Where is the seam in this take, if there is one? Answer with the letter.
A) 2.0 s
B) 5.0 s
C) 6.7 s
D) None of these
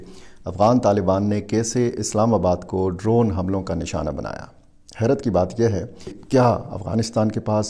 D